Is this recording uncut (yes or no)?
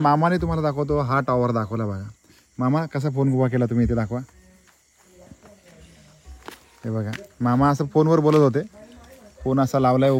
yes